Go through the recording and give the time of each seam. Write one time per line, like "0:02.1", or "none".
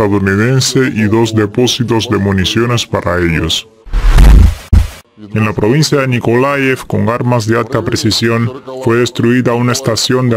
0:05.1

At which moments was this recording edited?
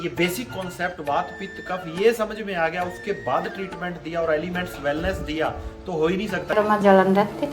0:06.6

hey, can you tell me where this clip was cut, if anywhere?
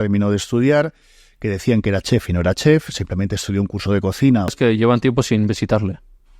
0:04.5

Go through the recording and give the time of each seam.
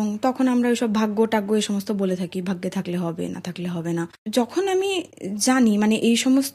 0:04.2

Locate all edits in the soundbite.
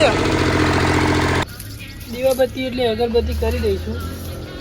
0:01.4

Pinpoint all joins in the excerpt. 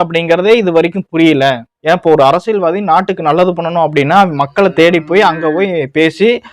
0:01.8

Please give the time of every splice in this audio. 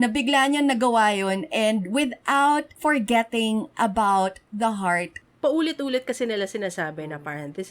0:02.7
0:05.2

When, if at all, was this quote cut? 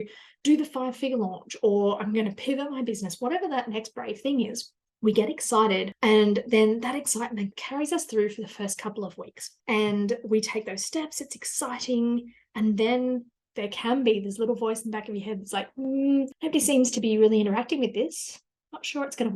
0:07.6
0:13.4

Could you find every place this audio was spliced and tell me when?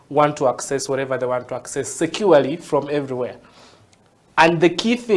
none

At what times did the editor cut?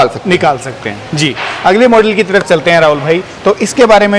none

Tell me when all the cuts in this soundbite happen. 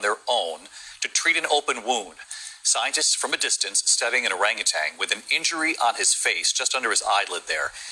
0:03.6

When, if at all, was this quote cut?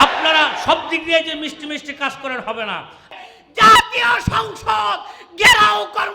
0:03.1

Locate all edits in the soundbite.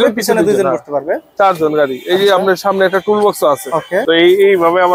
0:04.0

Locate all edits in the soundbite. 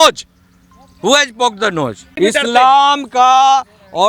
0:02.1

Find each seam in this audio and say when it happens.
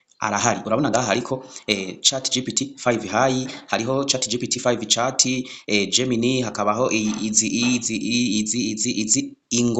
none

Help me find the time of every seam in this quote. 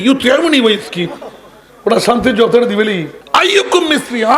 0:03.1

